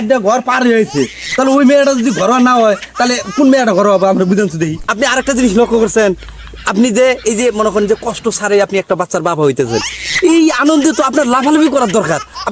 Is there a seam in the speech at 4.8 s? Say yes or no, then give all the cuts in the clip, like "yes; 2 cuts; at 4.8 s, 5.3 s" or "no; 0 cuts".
yes; 1 cut; at 4.8 s